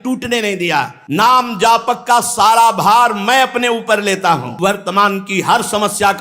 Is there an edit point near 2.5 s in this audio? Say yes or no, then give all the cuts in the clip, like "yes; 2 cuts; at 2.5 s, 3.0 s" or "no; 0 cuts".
no; 2 cuts; at 1.0 s, 4.5 s